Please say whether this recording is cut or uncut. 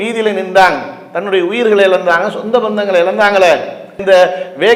uncut